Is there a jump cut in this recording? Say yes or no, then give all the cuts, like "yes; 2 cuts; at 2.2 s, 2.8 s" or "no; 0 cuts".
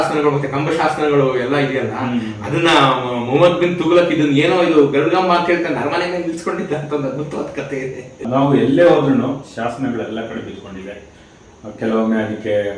yes; 1 cut; at 8.3 s